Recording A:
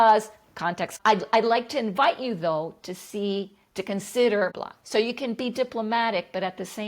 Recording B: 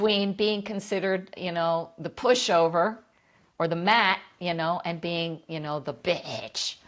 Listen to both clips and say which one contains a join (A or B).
A